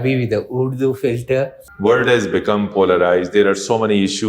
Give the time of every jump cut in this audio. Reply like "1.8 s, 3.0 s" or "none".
1.6 s